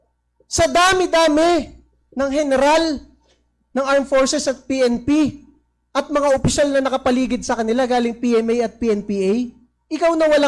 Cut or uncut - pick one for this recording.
uncut